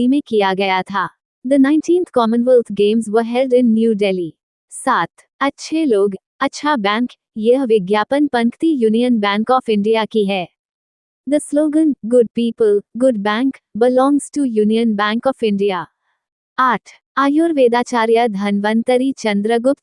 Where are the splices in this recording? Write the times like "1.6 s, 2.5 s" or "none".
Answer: 4.9 s, 16.6 s